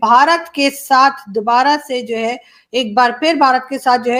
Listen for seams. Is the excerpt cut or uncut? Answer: uncut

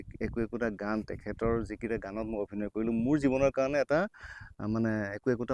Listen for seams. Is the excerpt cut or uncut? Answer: uncut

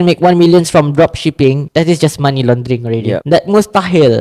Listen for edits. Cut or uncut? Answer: cut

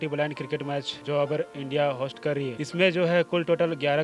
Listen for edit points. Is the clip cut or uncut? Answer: cut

